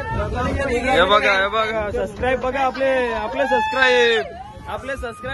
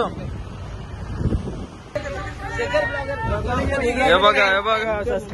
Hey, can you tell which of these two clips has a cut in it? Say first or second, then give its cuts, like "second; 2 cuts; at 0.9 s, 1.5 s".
second; 1 cut; at 2.0 s